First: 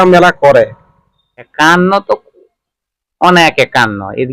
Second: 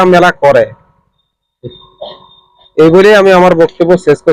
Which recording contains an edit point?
first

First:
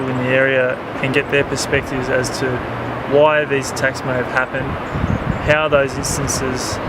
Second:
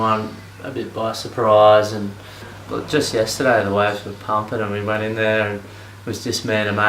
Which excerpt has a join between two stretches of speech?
first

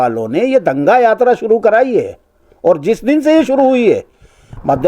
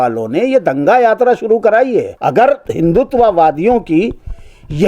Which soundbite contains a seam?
second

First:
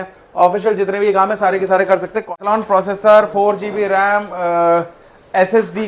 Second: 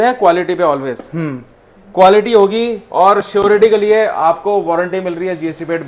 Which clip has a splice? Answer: first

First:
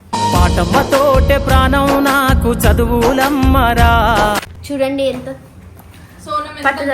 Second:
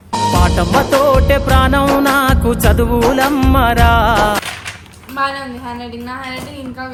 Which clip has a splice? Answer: first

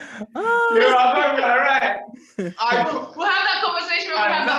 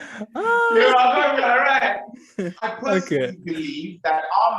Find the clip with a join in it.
second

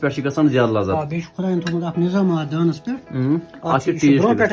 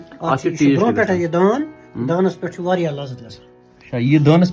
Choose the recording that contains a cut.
first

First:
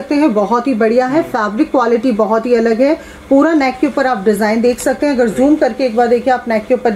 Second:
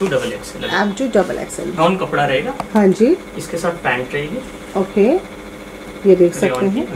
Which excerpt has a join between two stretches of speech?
second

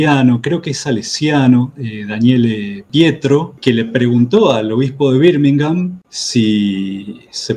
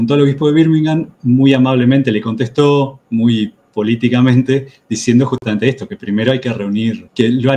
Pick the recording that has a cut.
first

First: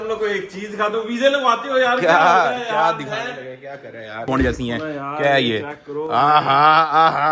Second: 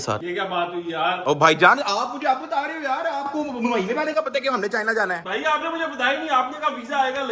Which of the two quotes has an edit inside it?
first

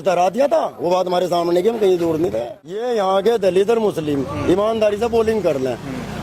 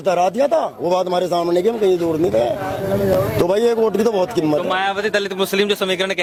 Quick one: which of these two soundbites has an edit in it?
first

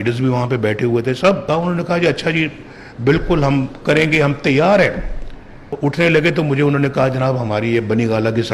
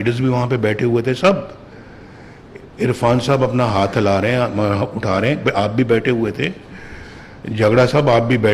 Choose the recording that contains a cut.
first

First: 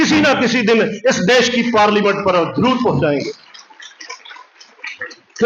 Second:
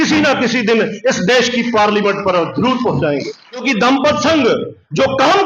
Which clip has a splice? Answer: second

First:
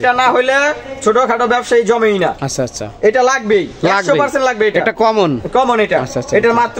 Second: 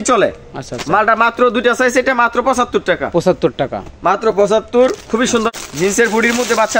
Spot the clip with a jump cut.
second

